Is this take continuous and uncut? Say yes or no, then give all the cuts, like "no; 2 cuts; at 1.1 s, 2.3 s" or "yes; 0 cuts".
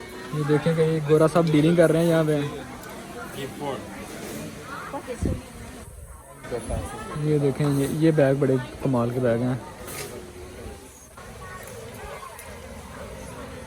yes; 0 cuts